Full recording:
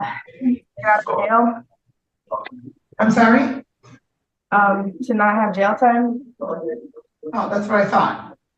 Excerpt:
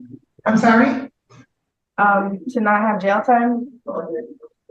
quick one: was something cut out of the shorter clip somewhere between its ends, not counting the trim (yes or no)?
no